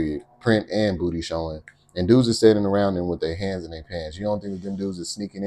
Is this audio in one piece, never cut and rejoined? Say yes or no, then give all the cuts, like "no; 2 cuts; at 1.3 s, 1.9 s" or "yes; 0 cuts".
yes; 0 cuts